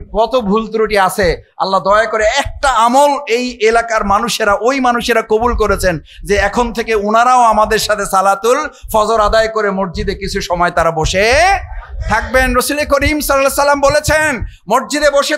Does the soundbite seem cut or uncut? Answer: uncut